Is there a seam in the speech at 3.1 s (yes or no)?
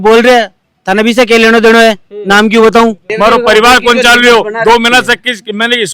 yes